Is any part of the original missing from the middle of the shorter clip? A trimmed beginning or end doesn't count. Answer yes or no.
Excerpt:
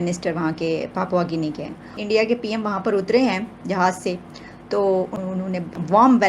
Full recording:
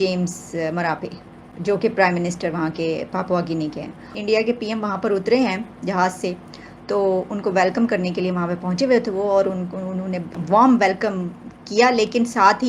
yes